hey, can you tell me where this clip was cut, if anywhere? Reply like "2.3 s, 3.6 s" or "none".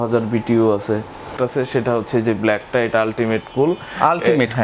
1.3 s